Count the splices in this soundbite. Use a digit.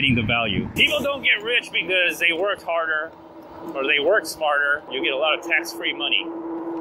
2